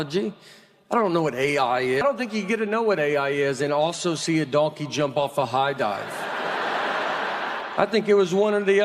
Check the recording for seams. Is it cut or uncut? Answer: cut